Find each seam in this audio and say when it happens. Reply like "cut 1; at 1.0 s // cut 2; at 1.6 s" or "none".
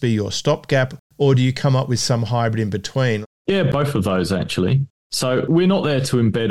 cut 1; at 1.0 s // cut 2; at 3.6 s // cut 3; at 5.4 s